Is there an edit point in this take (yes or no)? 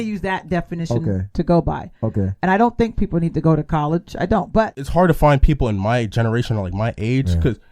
yes